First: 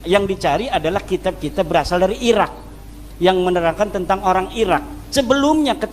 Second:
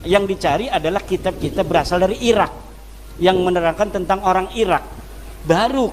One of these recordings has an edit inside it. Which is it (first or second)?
first